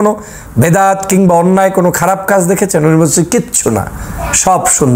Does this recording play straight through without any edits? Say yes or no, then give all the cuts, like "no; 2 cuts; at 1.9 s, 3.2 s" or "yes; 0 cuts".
yes; 0 cuts